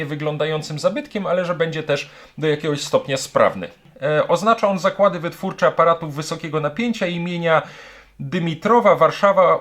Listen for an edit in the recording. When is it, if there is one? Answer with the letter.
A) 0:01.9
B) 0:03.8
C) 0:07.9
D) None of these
B